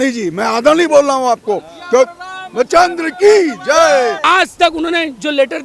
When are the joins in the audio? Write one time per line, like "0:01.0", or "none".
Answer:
0:04.2